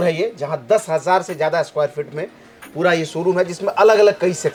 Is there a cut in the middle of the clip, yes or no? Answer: no